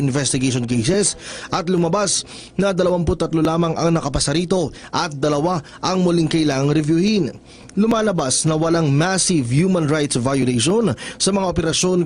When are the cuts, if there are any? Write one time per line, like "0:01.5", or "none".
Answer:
0:09.0